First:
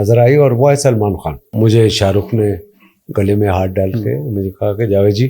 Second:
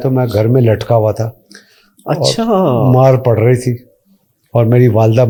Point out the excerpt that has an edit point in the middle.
first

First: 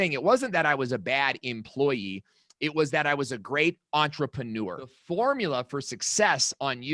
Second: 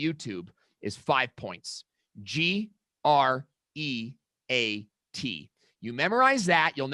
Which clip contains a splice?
first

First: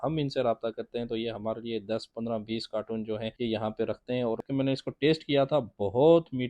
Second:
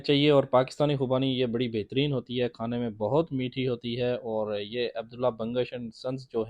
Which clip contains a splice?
first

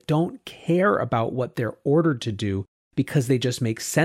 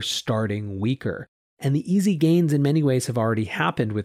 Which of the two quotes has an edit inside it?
second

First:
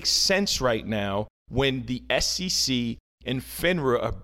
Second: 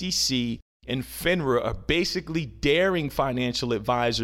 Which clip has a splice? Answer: first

